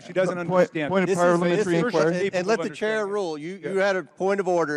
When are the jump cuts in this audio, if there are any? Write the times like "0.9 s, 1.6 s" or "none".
none